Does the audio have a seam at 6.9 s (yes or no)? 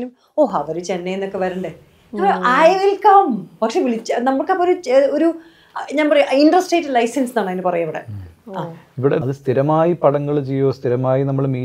no